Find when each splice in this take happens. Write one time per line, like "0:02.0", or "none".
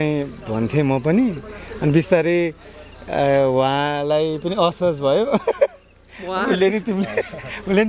none